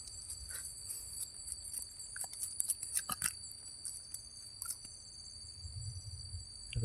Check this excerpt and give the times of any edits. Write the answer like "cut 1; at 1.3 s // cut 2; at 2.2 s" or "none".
none